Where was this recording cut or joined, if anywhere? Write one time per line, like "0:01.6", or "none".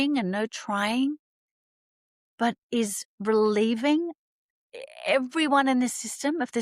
none